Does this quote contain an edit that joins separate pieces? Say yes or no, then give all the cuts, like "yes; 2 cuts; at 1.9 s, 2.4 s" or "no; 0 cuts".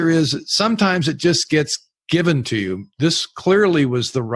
no; 0 cuts